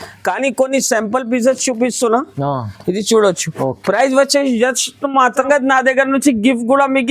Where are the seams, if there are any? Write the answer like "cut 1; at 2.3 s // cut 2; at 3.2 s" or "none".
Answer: cut 1; at 5.4 s